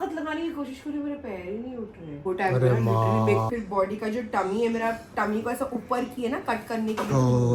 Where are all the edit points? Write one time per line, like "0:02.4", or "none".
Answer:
0:03.5